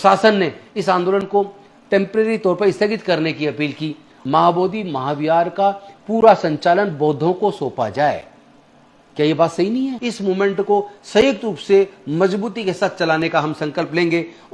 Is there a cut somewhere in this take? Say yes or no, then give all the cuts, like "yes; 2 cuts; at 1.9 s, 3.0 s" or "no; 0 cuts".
yes; 2 cuts; at 4.1 s, 10.0 s